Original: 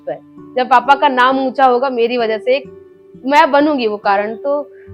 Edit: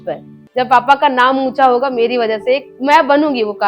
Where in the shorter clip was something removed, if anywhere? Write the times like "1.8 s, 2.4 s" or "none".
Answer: 2.7 s